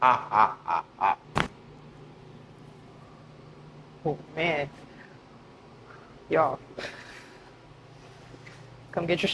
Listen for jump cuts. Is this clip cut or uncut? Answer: cut